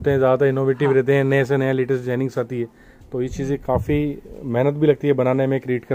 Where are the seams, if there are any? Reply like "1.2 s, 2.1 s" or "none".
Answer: none